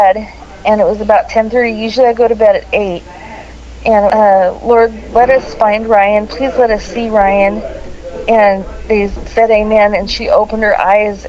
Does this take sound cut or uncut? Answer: cut